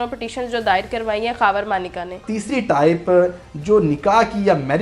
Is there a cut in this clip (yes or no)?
yes